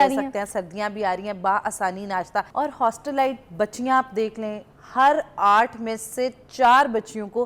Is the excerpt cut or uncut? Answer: cut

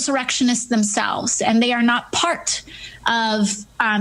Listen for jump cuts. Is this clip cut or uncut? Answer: cut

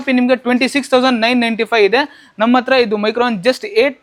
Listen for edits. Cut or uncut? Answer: uncut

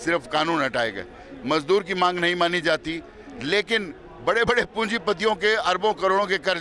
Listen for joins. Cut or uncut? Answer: uncut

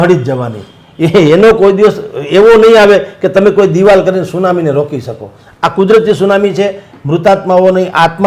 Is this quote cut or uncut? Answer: uncut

